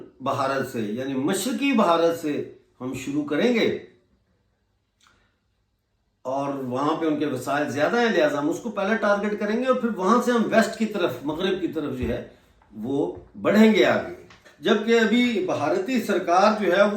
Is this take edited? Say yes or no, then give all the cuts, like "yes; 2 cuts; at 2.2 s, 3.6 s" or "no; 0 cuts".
yes; 1 cut; at 14.4 s